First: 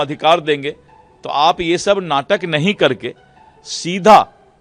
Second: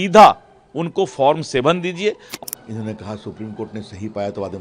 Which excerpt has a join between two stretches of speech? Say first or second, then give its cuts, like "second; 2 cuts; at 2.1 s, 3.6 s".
second; 1 cut; at 2.3 s